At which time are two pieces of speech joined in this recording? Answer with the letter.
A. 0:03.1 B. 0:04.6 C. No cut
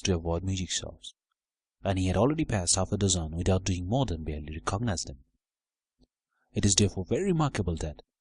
A